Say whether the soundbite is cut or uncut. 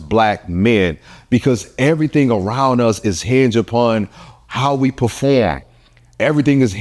uncut